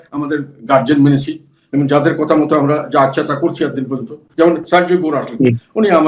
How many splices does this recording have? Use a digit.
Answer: 1